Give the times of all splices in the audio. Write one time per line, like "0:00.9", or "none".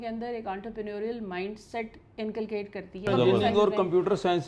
0:03.1